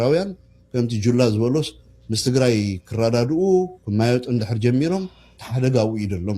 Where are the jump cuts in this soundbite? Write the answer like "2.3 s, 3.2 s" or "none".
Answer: none

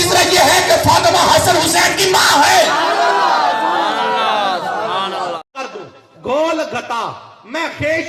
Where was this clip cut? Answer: 5.5 s

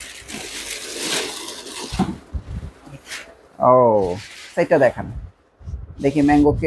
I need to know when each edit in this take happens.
4.5 s

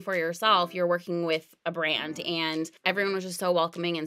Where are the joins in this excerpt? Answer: 2.8 s

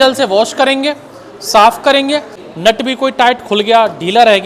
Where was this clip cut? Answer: 2.4 s

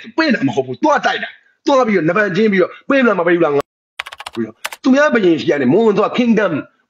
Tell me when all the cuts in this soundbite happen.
4.3 s

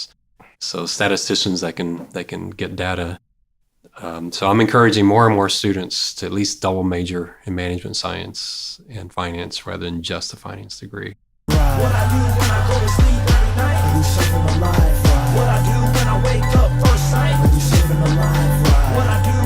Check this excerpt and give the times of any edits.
11.5 s

